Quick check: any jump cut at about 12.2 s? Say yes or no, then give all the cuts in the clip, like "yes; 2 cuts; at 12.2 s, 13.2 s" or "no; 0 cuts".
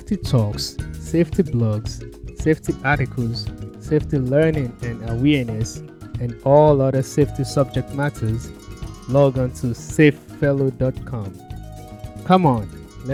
no; 0 cuts